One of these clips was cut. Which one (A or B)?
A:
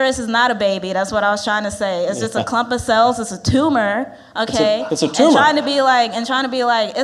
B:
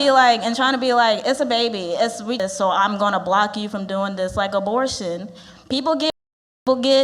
B